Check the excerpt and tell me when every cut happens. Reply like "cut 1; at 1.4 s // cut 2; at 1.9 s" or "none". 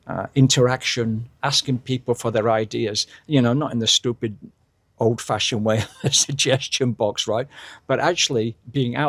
none